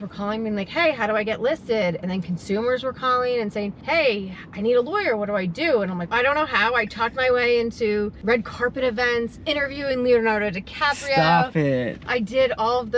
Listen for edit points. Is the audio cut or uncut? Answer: cut